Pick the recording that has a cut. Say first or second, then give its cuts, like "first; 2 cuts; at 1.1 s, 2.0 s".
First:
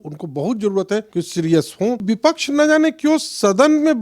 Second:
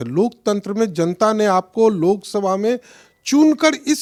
first; 2 cuts; at 1.1 s, 2.0 s